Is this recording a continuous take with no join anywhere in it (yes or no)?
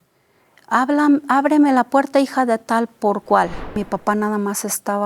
no